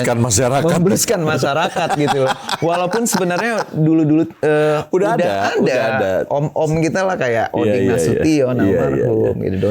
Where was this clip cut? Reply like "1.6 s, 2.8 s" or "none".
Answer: none